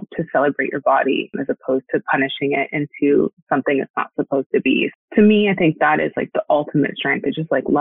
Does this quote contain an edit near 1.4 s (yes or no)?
yes